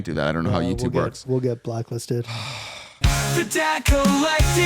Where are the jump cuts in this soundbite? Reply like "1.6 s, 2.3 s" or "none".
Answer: 2.9 s